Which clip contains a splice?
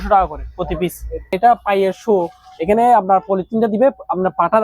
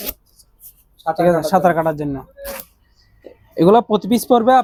first; 1 cut; at 1.3 s

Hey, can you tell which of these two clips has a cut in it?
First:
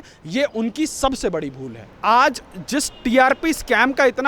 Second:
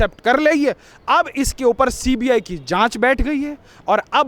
first; 1 cut; at 1.9 s

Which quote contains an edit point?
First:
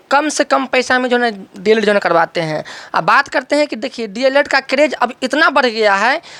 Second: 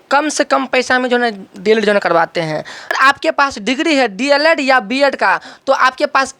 second; 1 cut; at 2.9 s

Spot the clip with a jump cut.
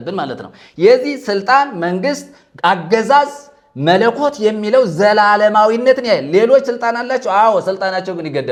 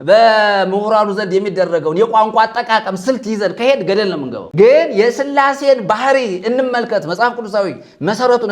second; 1 cut; at 4.4 s

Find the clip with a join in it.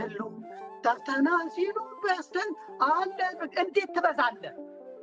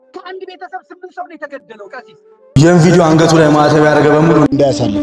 second; 1 cut; at 2.3 s

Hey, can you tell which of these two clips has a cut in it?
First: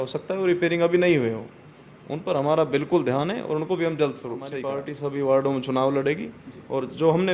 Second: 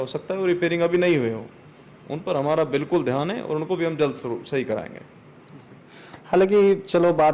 first; 1 cut; at 4.5 s

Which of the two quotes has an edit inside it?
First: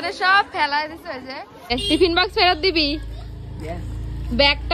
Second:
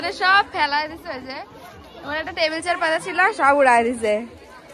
first; 1 cut; at 1.7 s

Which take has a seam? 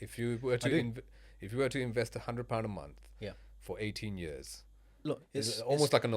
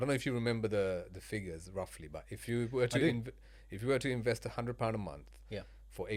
first; 1 cut; at 4.9 s

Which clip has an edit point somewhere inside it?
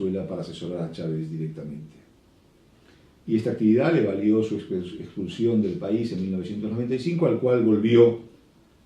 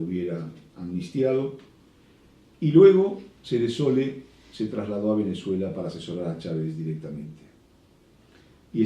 second; 1 cut; at 3.8 s

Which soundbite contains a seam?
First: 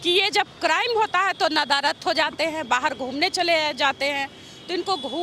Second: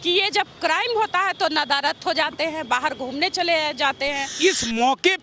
second; 1 cut; at 4.3 s

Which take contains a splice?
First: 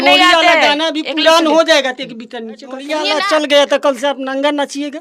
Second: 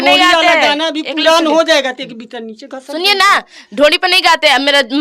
first; 1 cut; at 2.9 s

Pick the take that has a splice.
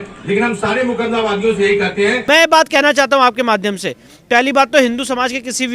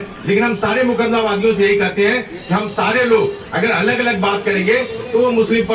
first; 1 cut; at 2.2 s

